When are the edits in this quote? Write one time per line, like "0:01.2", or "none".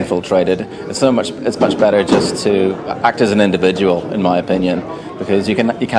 0:01.1